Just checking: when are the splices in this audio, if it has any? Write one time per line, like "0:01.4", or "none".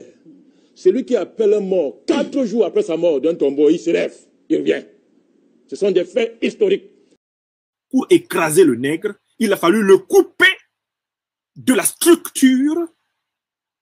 0:07.2

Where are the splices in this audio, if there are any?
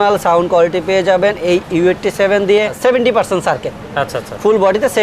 0:02.8

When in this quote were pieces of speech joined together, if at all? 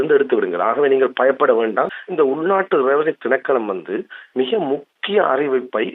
0:02.0

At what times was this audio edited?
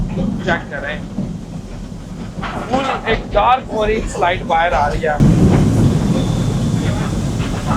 0:05.2

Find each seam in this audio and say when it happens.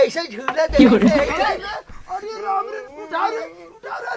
0:01.7

